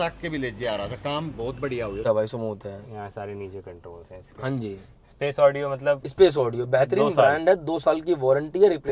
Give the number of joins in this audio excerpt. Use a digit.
1